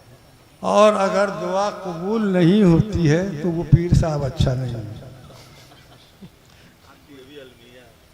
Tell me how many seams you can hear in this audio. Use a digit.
0